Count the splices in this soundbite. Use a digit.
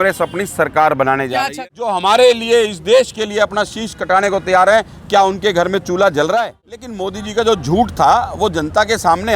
2